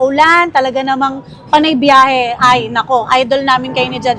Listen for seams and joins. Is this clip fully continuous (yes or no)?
yes